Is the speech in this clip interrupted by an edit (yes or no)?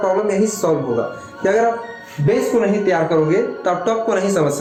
no